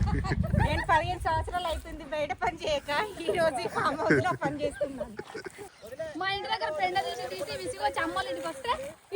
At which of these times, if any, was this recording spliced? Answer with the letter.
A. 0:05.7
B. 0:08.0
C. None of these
A